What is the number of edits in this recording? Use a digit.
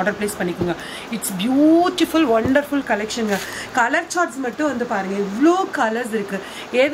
0